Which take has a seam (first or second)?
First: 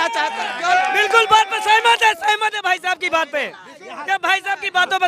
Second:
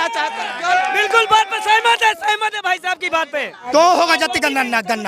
second